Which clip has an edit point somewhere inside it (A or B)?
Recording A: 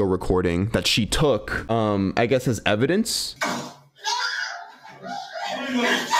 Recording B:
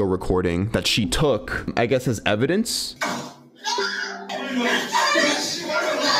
B